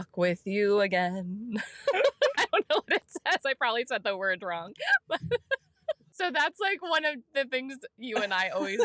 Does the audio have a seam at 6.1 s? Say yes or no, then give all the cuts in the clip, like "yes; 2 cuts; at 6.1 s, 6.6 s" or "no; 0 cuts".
yes; 1 cut; at 6.1 s